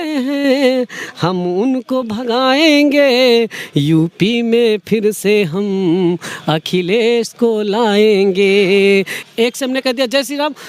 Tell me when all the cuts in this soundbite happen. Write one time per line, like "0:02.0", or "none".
0:09.2